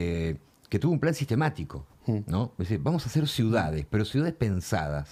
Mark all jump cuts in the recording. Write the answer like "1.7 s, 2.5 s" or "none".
none